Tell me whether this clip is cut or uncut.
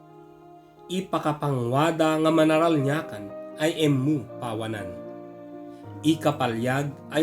cut